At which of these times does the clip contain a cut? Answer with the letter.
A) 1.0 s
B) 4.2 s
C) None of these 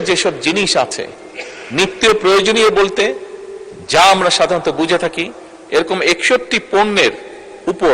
C